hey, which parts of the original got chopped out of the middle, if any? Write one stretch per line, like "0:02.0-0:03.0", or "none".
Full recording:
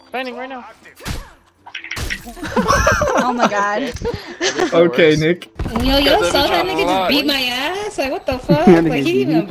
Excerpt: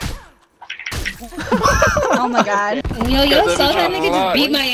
0:03.9-0:05.6